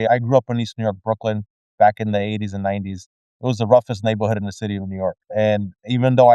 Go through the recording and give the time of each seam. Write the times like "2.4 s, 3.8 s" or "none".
none